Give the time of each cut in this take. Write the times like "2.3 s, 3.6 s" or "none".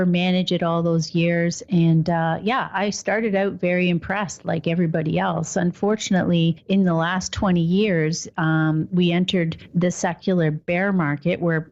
none

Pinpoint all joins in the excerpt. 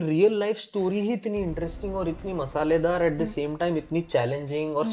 none

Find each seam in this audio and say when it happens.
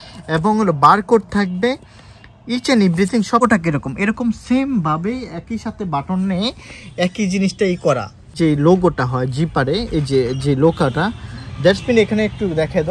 3.4 s, 8.3 s

